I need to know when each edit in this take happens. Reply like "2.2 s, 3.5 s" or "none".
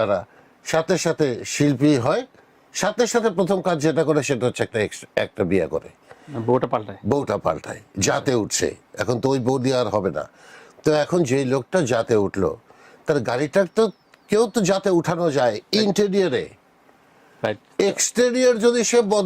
none